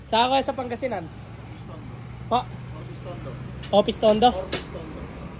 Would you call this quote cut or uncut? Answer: uncut